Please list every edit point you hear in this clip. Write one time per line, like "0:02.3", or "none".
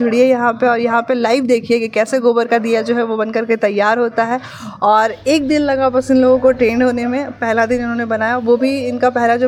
none